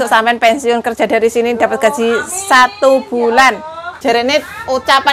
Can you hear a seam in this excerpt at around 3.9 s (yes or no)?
yes